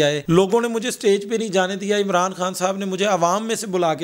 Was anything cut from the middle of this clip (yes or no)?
no